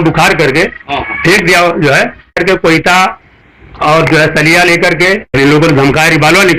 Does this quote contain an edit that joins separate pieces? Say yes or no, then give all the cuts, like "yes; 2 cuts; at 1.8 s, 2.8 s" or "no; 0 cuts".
yes; 2 cuts; at 2.4 s, 5.3 s